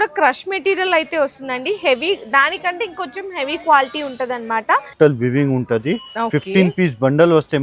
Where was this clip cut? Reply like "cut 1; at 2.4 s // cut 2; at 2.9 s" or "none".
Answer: cut 1; at 4.9 s